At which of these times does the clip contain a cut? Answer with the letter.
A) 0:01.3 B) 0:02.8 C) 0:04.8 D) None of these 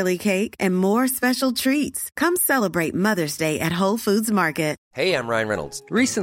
C